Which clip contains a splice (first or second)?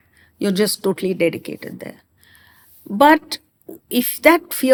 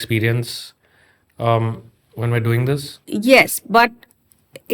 second